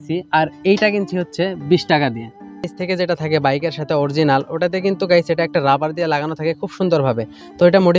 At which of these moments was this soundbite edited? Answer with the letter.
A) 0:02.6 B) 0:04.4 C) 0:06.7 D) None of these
A